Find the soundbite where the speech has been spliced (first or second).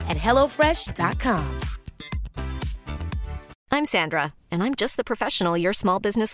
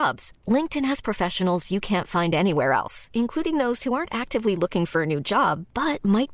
first